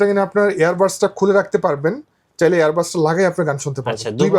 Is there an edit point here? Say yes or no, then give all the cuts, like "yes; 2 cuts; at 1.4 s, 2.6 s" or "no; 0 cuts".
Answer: no; 0 cuts